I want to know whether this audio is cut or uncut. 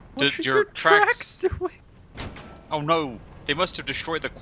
cut